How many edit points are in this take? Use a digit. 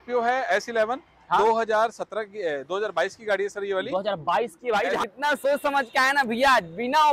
1